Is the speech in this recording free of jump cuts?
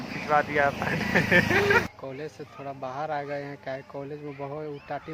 no; 1 cut; at 1.9 s

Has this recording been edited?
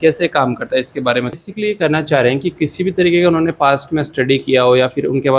yes; 1 cut; at 1.4 s

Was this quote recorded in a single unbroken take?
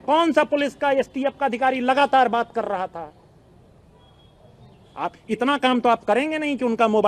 yes; 0 cuts

